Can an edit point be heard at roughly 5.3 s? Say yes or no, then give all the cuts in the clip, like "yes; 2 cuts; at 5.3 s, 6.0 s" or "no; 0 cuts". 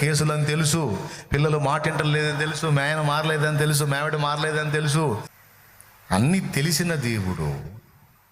yes; 1 cut; at 5.3 s